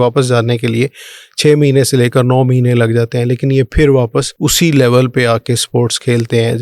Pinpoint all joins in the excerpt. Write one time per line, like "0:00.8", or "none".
0:04.3